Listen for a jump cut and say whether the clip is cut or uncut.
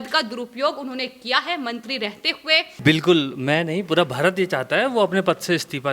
cut